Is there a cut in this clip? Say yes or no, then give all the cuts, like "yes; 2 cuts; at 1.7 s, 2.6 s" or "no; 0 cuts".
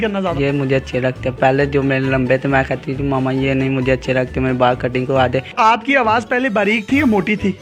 no; 0 cuts